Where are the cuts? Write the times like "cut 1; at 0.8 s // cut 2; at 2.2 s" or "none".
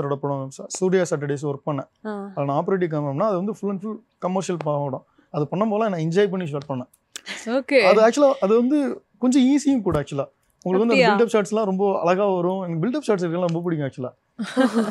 none